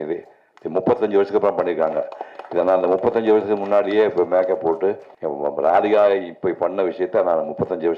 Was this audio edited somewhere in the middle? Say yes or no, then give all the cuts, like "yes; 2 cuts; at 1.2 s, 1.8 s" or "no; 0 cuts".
yes; 1 cut; at 5.1 s